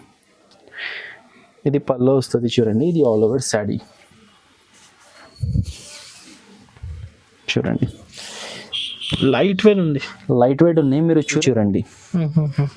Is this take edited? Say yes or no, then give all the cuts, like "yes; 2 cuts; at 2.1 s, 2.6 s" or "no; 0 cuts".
yes; 1 cut; at 11.4 s